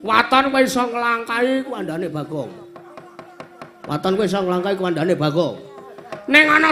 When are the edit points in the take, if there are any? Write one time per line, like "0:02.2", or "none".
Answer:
0:00.9